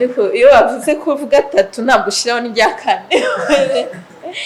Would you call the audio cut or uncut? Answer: uncut